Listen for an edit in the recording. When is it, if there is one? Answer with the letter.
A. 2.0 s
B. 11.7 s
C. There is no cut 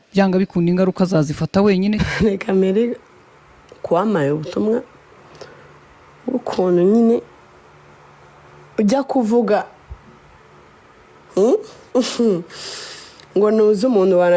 A